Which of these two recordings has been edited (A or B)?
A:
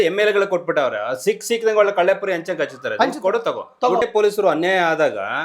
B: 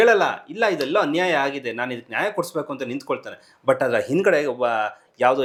A